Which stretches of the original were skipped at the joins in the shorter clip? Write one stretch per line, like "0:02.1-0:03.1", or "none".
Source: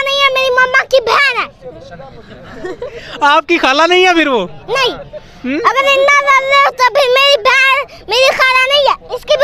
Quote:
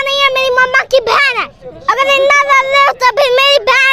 0:01.9-0:05.7